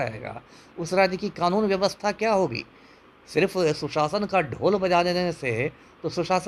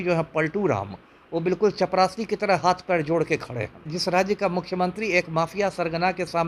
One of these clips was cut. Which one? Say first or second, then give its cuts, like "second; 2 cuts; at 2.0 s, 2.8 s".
second; 1 cut; at 3.9 s